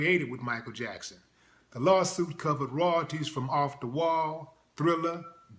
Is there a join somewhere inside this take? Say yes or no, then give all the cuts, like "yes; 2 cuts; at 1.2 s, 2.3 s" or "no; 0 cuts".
no; 0 cuts